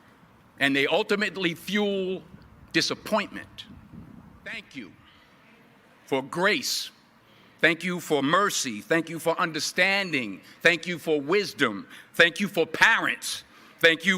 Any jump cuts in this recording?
yes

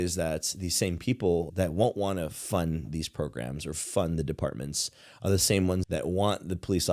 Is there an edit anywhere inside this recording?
yes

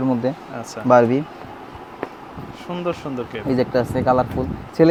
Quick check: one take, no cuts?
yes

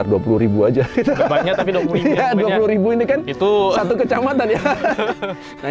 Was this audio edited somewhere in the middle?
no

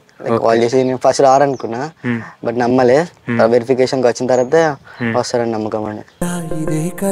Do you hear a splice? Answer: yes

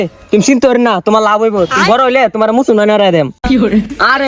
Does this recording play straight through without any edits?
no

